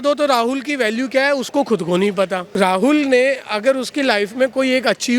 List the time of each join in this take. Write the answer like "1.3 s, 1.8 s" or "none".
2.4 s